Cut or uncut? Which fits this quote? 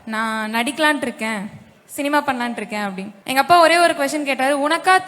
cut